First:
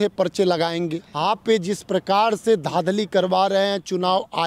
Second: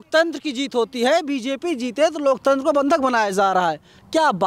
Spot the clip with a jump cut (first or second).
first